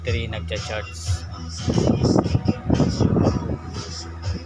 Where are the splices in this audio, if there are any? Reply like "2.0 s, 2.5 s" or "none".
1.7 s